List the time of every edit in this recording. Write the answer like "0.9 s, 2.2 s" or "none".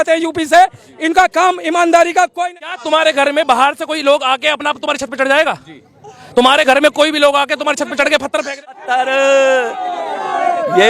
2.3 s, 8.6 s